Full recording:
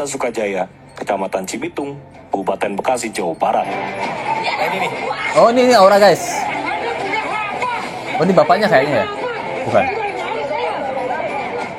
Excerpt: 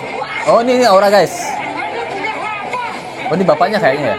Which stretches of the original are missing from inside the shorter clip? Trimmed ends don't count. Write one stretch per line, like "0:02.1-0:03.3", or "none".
none